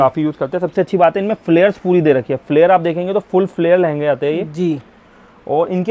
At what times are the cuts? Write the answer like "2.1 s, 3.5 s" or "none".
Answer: none